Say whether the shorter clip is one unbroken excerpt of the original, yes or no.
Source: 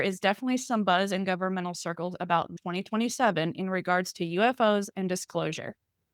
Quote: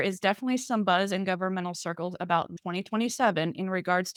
yes